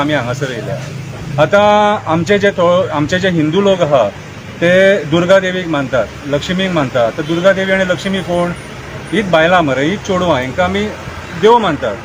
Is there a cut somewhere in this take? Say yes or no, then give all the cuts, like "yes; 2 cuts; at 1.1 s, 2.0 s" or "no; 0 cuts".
no; 0 cuts